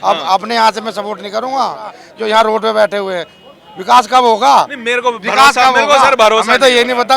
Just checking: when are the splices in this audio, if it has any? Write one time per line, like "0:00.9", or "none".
0:02.1